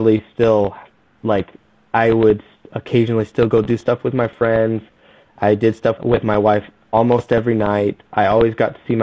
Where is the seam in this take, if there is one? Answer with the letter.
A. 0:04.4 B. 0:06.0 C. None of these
B